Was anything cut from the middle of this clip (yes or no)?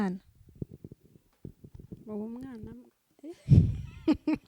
no